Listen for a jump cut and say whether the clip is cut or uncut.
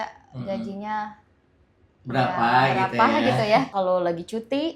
cut